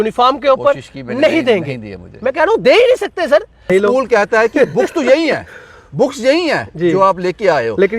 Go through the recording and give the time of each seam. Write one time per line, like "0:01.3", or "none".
0:03.7